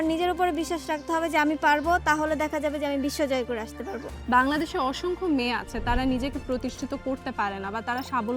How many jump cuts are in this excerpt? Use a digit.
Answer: 1